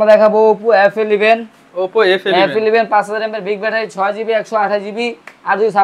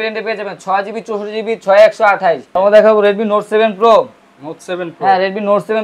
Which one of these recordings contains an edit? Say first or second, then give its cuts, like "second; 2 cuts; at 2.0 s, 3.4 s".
second; 1 cut; at 2.5 s